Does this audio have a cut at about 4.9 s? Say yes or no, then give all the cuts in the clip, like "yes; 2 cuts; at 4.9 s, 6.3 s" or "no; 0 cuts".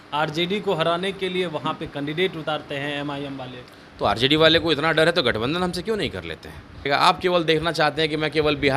no; 1 cut; at 6.9 s